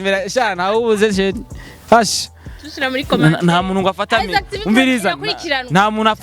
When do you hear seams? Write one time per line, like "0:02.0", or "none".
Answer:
none